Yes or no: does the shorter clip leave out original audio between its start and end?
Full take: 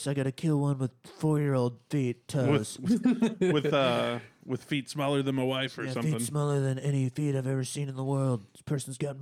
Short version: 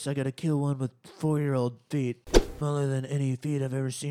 yes